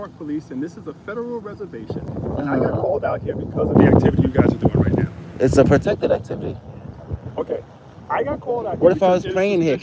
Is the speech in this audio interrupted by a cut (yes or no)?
no